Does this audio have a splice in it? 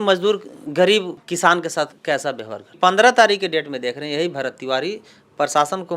yes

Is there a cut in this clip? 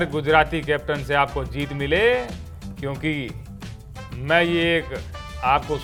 no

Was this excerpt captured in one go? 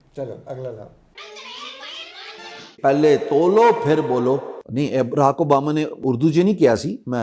no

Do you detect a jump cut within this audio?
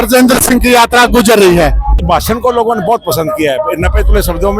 yes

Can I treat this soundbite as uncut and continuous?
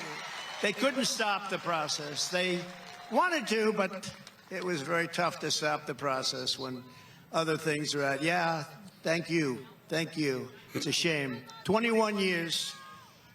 no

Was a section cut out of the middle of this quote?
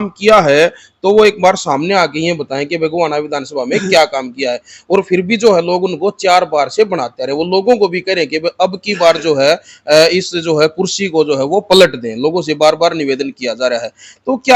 no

